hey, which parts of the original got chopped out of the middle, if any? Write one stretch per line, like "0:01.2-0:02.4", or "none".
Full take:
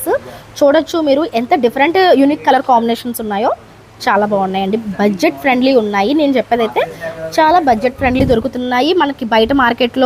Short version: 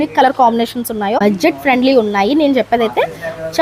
0:03.5-0:05.0